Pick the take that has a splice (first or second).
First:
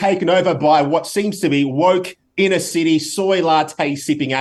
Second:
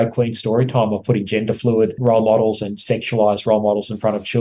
second